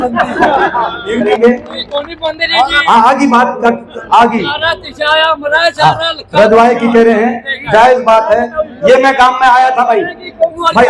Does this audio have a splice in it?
yes; 1 cut; at 1.3 s

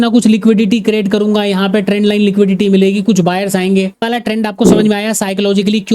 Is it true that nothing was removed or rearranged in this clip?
no; 1 cut; at 4.0 s

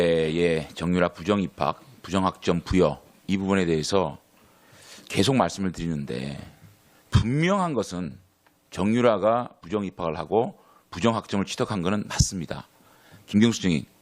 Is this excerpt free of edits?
no; 1 cut; at 12.1 s

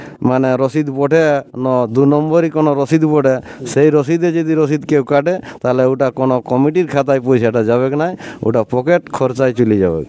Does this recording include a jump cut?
no; 0 cuts

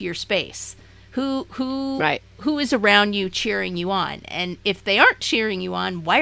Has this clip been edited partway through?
no; 0 cuts

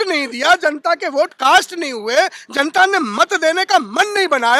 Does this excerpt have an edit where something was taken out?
no; 0 cuts

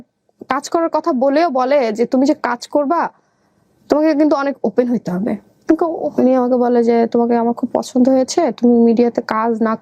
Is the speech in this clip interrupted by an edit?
yes; 1 cut; at 5.6 s

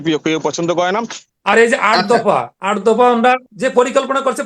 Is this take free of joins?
no; 2 cuts; at 1.2 s, 3.5 s

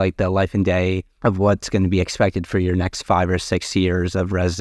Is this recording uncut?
no; 1 cut; at 1.1 s

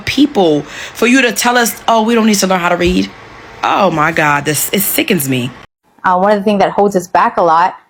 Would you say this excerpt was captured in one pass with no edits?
yes; 0 cuts

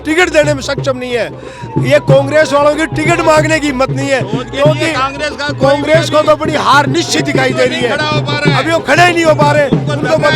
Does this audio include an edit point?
no; 0 cuts

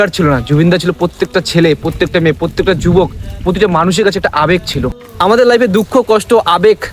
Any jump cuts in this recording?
yes; 1 cut; at 5.1 s

